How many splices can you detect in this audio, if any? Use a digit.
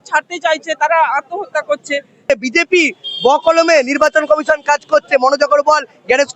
1